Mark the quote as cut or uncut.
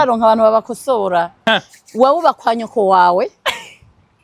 cut